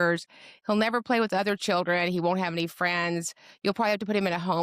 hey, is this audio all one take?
yes; 0 cuts

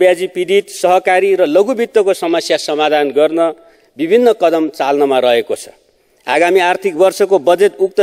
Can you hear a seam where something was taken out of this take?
no; 0 cuts

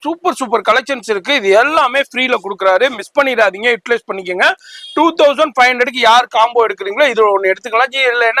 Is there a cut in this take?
no; 0 cuts

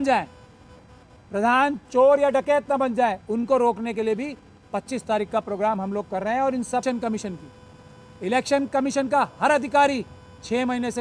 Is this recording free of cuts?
no; 1 cut; at 6.8 s

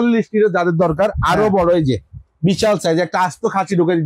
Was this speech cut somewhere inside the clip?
no; 0 cuts

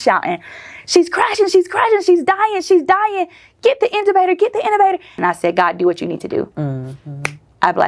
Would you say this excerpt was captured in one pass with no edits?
no; 1 cut; at 5.2 s

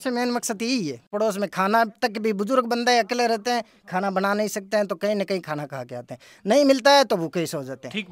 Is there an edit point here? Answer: yes; 1 cut; at 1.1 s

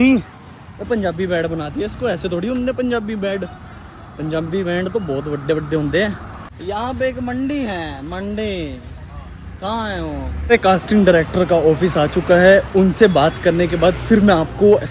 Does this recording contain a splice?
yes; 2 cuts; at 6.3 s, 10.6 s

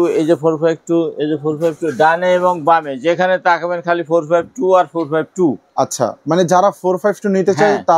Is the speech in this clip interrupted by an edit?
no; 0 cuts

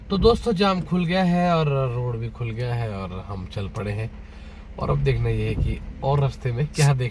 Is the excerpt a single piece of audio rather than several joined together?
yes; 0 cuts

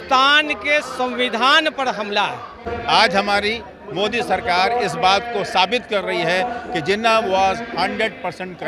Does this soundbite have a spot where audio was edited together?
yes; 1 cut; at 2.6 s

